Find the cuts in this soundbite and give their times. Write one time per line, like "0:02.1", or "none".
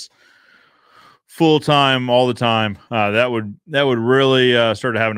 none